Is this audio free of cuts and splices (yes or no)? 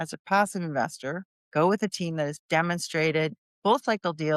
no